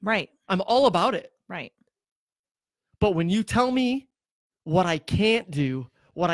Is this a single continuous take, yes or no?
yes